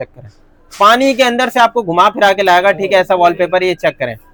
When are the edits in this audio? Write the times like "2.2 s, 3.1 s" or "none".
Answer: none